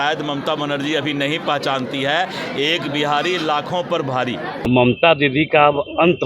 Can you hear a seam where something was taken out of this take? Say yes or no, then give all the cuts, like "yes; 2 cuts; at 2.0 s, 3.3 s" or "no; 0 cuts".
yes; 1 cut; at 4.7 s